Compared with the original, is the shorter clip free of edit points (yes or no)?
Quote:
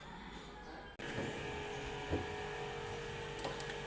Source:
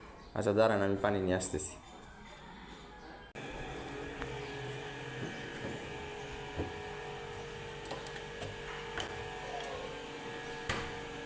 no